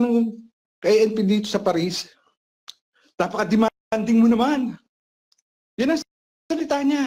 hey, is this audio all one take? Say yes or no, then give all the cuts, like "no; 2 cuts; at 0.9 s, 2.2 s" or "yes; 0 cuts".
yes; 0 cuts